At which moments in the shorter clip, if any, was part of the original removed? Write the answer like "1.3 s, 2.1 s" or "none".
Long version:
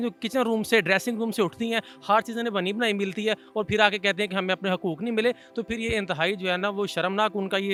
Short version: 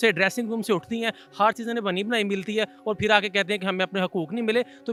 none